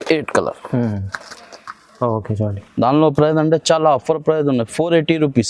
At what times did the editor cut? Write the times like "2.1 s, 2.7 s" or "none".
none